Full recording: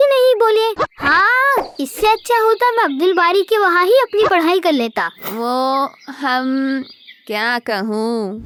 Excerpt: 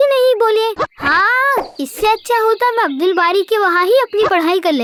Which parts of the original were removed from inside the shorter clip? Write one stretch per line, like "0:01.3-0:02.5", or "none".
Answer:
none